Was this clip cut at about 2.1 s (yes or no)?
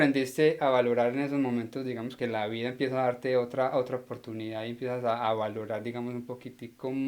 yes